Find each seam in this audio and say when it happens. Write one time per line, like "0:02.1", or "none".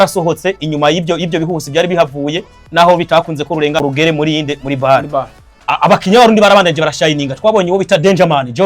0:03.8
0:06.0